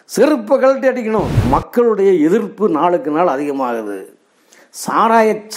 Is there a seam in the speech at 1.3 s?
yes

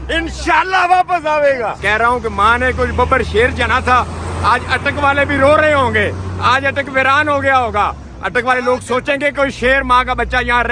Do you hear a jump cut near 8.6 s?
no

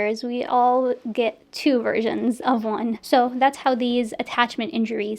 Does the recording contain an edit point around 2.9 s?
yes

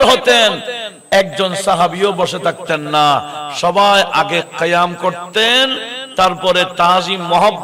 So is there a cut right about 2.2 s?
no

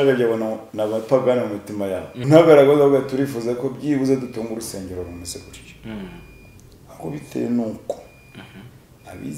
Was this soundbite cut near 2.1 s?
yes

